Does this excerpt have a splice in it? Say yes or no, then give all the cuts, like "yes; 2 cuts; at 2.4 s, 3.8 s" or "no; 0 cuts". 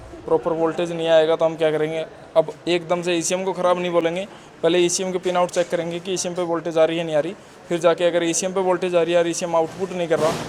no; 0 cuts